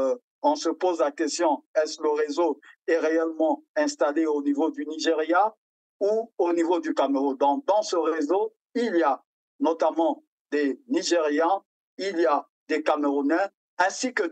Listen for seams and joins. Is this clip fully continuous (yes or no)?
yes